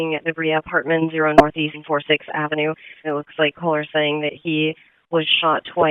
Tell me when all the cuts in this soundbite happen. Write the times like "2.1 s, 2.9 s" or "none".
2.9 s